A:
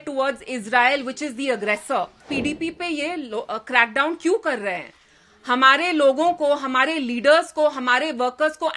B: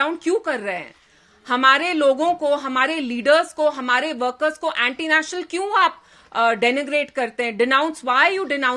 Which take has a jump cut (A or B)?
A